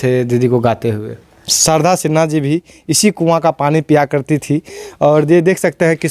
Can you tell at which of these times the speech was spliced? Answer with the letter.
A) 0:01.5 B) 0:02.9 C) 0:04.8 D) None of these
A